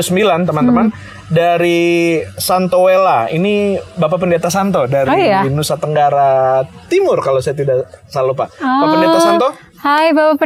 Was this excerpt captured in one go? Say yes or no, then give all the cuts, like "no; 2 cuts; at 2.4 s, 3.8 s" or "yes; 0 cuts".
yes; 0 cuts